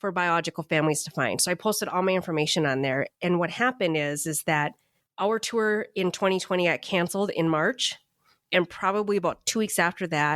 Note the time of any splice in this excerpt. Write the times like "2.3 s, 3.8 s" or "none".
none

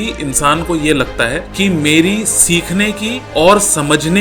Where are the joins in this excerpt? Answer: 1.5 s, 3.1 s

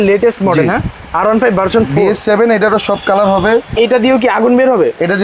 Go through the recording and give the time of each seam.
3.7 s

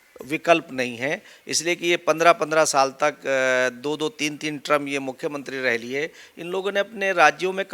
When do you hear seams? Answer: none

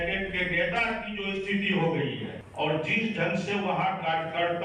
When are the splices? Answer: 2.4 s

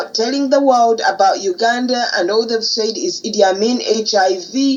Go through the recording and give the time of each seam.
none

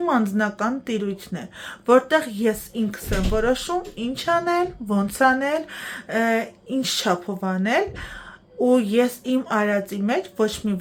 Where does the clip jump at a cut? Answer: none

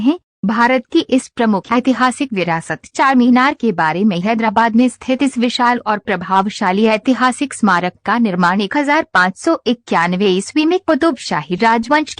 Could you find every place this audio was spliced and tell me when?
3.9 s

